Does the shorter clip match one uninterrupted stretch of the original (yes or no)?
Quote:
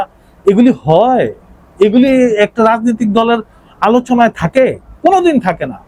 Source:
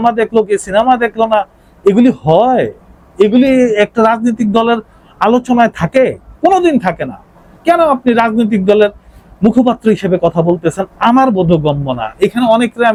yes